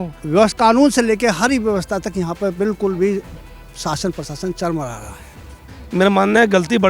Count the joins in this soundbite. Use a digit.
1